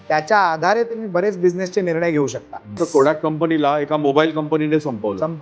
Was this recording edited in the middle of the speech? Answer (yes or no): yes